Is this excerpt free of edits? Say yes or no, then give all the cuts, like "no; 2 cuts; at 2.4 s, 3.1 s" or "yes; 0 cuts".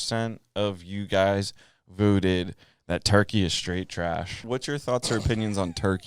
no; 1 cut; at 4.3 s